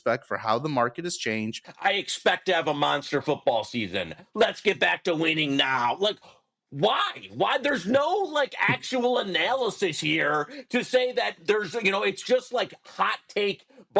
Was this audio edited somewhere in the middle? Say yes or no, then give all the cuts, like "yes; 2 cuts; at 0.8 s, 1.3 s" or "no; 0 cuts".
yes; 1 cut; at 1.6 s